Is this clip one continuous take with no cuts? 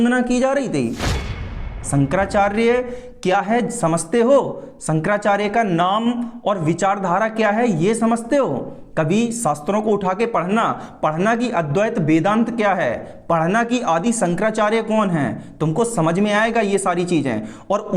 no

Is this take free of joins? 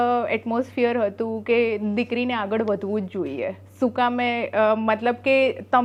yes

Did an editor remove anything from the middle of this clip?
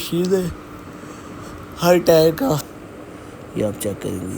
yes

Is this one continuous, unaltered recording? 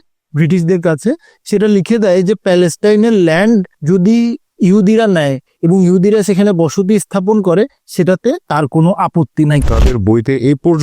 no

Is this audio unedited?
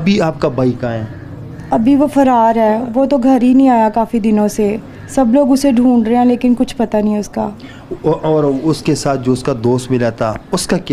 yes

